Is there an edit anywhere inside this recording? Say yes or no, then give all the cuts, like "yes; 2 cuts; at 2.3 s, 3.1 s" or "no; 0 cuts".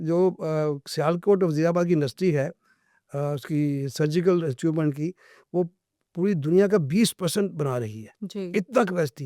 no; 0 cuts